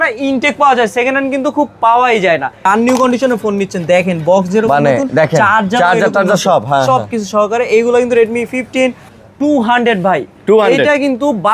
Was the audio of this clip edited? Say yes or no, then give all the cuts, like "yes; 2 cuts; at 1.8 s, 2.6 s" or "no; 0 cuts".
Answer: yes; 2 cuts; at 2.6 s, 9.1 s